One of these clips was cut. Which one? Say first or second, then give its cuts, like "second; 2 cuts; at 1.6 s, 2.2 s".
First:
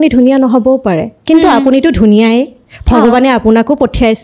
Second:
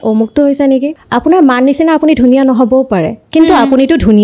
second; 1 cut; at 1.0 s